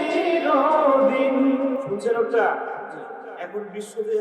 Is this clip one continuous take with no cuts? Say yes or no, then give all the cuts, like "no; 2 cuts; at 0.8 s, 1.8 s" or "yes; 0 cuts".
no; 1 cut; at 1.8 s